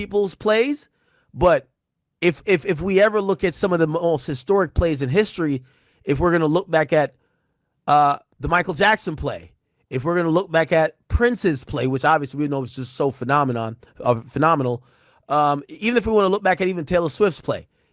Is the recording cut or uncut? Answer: uncut